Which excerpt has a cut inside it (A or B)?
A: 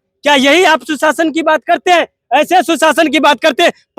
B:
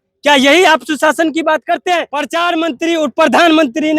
B